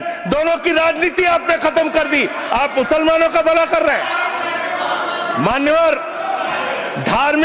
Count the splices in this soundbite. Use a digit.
1